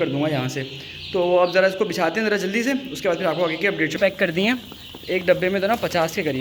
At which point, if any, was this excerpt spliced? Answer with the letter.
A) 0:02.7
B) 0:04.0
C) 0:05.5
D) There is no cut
B